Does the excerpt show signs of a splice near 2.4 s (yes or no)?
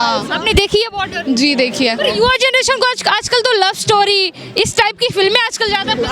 no